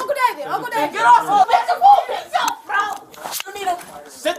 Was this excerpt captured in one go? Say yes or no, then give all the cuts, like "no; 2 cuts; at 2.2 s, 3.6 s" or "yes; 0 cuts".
no; 1 cut; at 1.5 s